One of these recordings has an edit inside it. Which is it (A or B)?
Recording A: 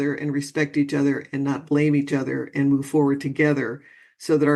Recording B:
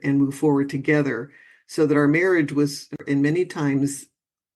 B